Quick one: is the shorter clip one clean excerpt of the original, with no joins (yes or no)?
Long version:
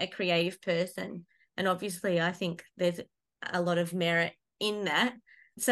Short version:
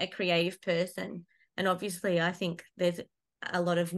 yes